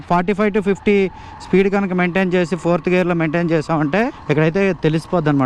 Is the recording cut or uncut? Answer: cut